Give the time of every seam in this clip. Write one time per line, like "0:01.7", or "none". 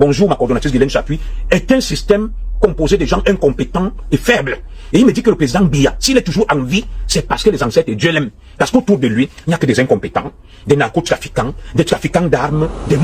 none